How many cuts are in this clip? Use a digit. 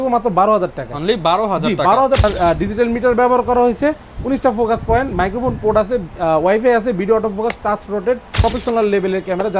2